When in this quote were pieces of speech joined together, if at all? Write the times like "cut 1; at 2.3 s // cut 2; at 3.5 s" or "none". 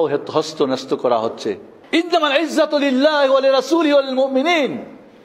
cut 1; at 1.7 s